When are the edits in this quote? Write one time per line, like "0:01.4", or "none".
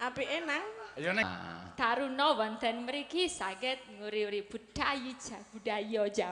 0:01.2